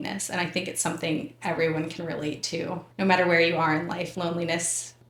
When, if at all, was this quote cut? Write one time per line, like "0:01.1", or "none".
none